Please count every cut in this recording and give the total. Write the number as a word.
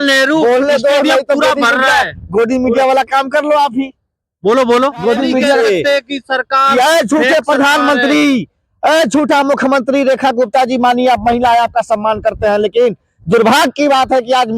one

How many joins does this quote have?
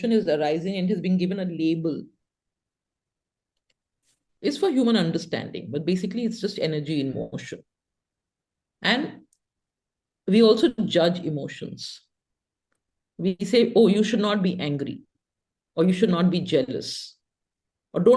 zero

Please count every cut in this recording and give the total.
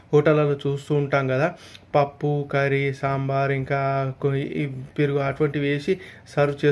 zero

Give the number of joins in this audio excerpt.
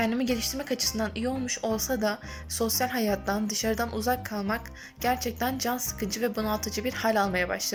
zero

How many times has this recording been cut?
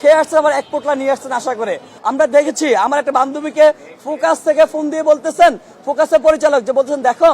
one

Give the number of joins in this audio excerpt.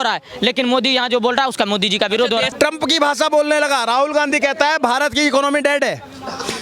one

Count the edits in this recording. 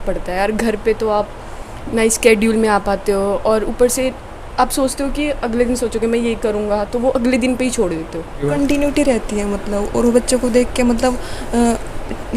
one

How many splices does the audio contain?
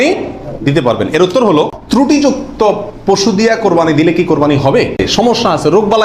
two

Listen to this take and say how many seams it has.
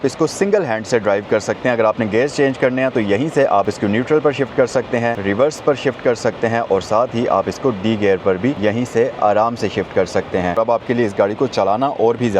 four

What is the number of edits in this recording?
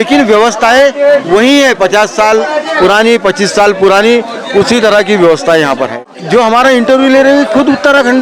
one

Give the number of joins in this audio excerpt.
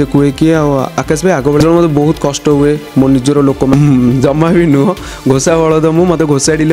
two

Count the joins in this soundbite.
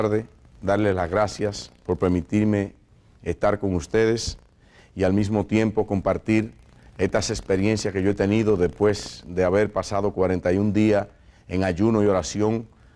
zero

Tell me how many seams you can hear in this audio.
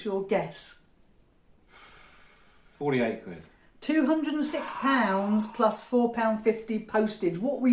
one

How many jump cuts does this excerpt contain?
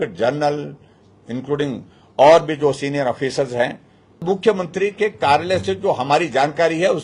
one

